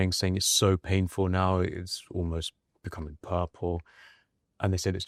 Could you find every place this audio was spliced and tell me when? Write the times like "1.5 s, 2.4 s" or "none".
none